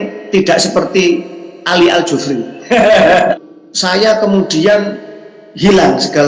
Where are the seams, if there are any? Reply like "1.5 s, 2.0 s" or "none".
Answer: 3.4 s